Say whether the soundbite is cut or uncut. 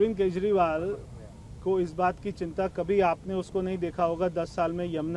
uncut